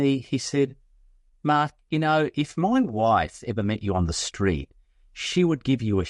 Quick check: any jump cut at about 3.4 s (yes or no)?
no